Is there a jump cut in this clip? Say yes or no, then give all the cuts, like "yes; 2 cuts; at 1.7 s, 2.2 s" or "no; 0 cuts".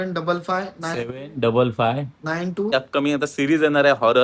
yes; 1 cut; at 2.7 s